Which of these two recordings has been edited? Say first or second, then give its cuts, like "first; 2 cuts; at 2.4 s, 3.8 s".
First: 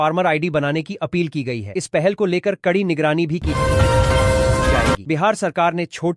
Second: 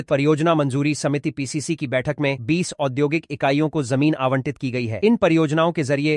first; 2 cuts; at 3.5 s, 5.0 s